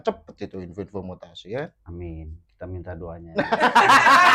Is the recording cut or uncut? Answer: uncut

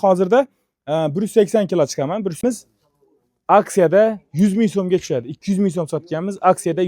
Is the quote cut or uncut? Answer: cut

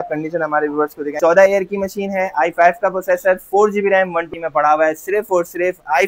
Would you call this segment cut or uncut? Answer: cut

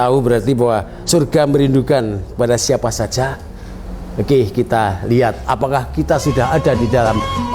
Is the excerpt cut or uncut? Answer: cut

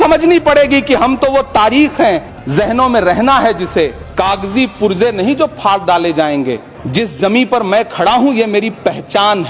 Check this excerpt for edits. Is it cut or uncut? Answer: cut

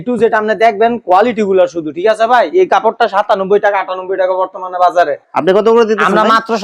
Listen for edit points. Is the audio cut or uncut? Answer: uncut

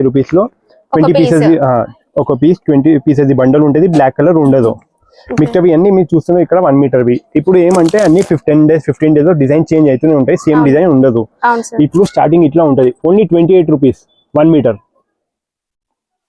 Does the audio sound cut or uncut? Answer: uncut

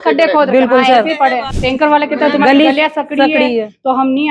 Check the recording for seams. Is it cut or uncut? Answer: cut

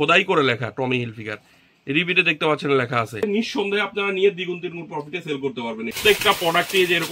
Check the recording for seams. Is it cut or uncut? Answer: cut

